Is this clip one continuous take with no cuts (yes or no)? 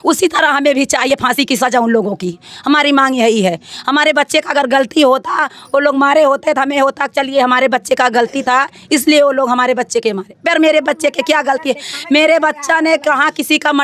yes